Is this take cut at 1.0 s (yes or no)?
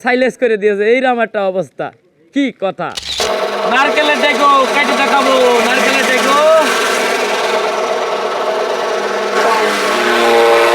no